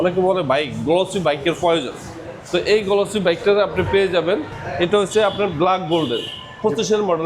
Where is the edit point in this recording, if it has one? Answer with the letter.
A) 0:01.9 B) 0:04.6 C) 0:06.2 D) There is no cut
B